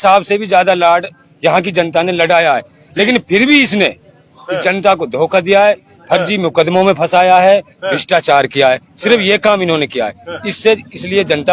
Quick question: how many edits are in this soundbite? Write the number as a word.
zero